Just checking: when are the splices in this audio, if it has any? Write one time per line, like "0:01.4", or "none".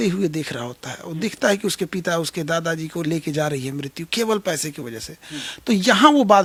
none